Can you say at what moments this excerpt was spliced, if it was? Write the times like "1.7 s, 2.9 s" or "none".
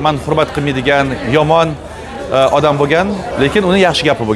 3.3 s